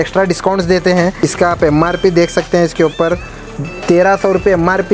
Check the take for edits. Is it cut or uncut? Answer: cut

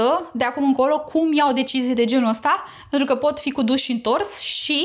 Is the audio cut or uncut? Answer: uncut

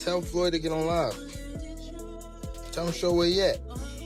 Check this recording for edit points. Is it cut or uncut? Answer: uncut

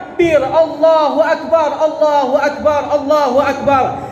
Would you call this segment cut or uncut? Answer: uncut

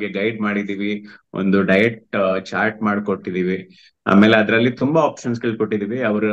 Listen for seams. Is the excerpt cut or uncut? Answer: uncut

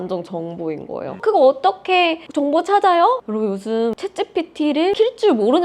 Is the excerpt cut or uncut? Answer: cut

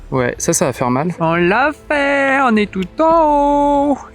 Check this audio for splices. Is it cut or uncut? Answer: cut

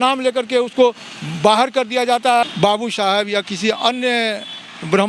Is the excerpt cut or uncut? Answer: cut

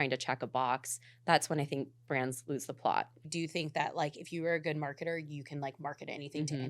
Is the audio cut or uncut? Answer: cut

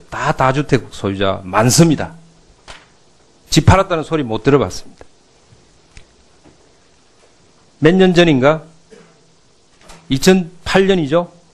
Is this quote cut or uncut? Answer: uncut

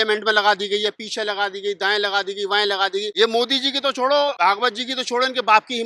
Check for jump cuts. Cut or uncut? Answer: cut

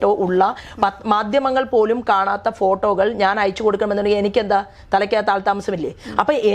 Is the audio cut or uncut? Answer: uncut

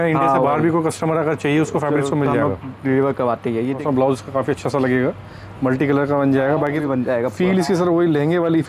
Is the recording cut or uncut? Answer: cut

